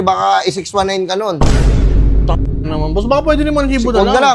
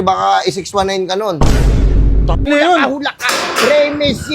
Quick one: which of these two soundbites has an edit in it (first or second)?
second